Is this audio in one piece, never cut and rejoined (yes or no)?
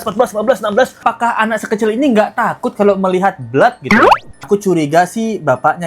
no